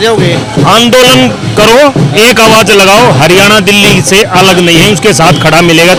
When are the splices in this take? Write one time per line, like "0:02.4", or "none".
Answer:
none